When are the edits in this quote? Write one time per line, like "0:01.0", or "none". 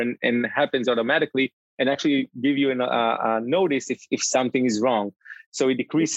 none